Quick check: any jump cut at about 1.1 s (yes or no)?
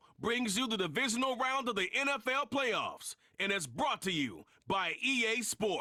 no